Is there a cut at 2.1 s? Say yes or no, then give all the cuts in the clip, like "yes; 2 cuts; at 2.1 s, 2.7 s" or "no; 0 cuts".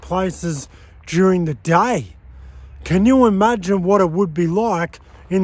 no; 0 cuts